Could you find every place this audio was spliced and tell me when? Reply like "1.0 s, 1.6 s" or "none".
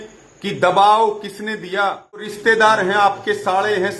2.3 s